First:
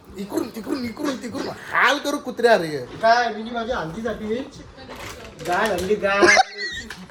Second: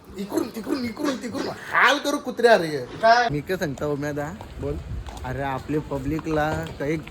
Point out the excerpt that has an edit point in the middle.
second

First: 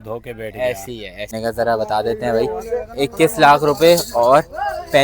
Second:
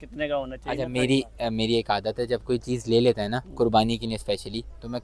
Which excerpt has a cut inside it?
first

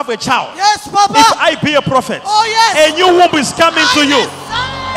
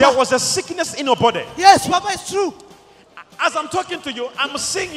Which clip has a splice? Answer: first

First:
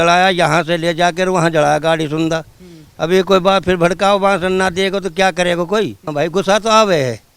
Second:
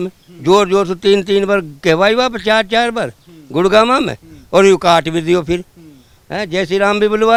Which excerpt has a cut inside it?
first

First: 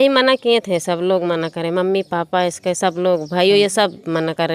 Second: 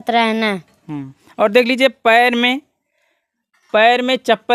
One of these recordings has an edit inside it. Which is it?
second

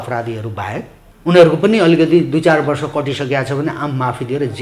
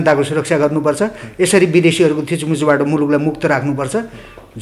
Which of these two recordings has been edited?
first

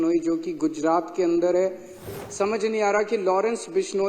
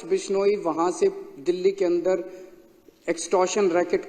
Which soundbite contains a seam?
first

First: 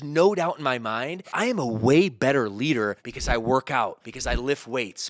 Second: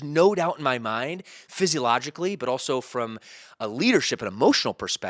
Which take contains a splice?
first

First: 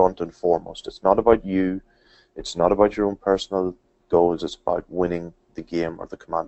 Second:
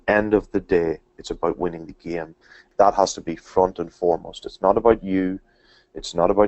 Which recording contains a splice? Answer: second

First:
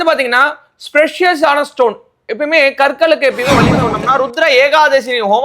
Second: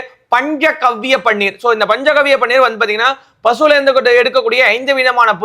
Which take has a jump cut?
first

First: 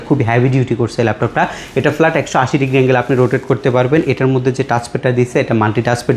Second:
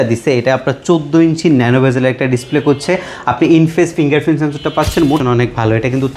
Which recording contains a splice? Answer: second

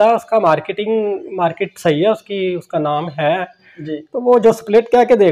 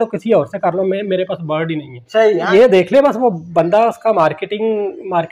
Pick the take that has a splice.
second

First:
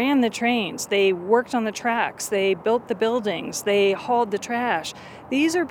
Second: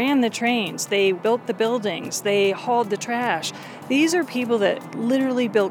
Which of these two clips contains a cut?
second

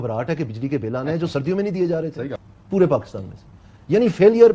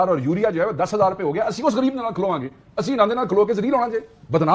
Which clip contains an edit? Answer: first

